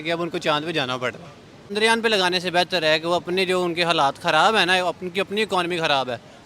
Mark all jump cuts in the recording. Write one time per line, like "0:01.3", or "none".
0:01.7